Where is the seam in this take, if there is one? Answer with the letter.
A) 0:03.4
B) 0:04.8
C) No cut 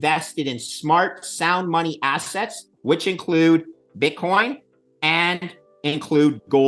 C